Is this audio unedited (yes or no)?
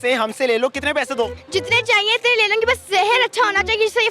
no